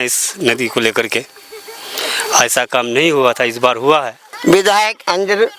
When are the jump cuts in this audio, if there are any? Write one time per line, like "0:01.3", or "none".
0:04.2